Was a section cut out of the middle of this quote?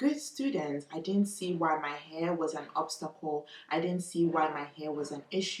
no; 0 cuts

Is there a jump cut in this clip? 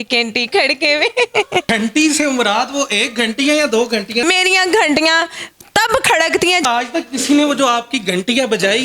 yes; 3 cuts; at 1.7 s, 4.2 s, 6.6 s

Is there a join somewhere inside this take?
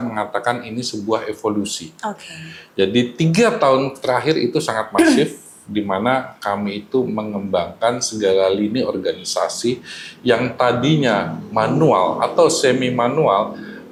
no; 0 cuts

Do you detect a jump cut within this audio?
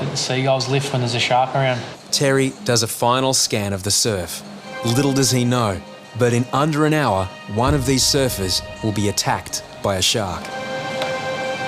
yes; 5 cuts; at 2.0 s, 4.7 s, 7.4 s, 8.7 s, 10.5 s

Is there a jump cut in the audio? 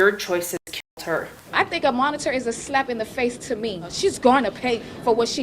yes; 2 cuts; at 1.4 s, 3.9 s

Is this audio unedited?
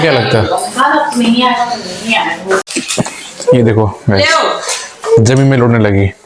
no; 1 cut; at 2.7 s

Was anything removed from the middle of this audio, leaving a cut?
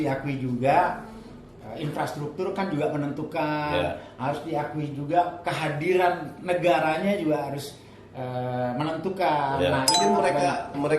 yes; 1 cut; at 9.9 s

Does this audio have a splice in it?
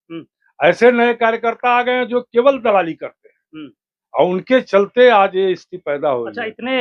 no; 0 cuts

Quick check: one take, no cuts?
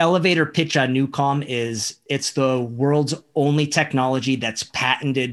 yes; 0 cuts

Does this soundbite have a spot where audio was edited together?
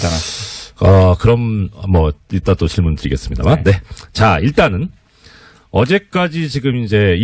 no; 0 cuts

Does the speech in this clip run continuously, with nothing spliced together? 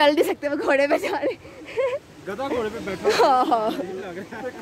yes; 0 cuts

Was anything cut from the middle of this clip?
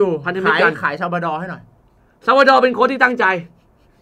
no; 0 cuts

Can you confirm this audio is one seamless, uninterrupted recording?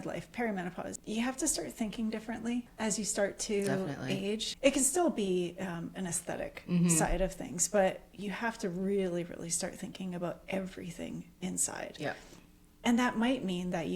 no; 3 cuts; at 0.9 s, 2.7 s, 4.5 s

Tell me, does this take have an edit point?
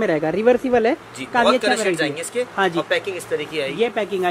no; 0 cuts

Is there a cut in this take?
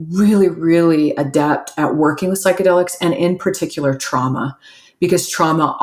no; 0 cuts

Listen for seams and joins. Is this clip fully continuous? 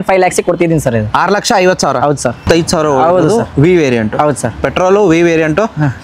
no; 1 cut; at 2.4 s

